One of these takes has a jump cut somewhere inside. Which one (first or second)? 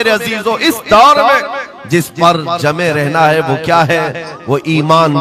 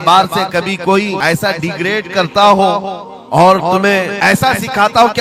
second